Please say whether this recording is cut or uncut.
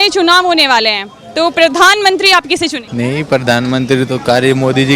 cut